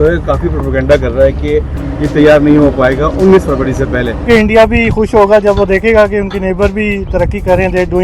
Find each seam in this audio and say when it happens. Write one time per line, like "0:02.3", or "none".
0:01.8
0:04.2